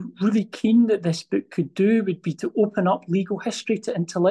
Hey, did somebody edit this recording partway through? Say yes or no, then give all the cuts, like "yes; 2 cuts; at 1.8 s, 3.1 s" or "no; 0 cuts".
no; 0 cuts